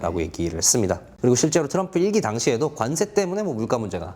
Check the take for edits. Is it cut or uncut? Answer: cut